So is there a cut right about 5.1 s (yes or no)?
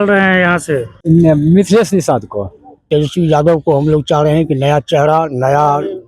no